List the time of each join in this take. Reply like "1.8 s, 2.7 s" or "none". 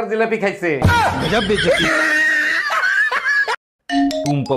none

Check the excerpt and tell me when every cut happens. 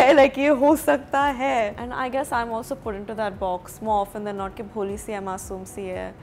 1.8 s

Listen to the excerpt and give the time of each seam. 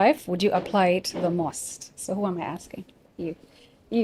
none

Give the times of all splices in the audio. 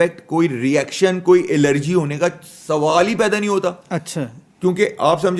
none

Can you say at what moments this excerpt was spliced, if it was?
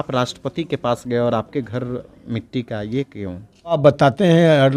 3.8 s

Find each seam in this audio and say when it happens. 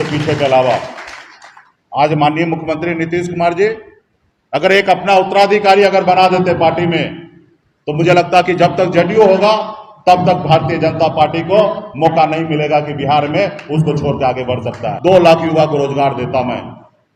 14.9 s

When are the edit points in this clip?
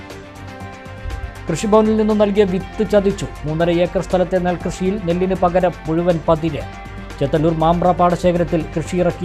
0.9 s

